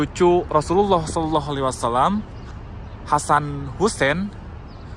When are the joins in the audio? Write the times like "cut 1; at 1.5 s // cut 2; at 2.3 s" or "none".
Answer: none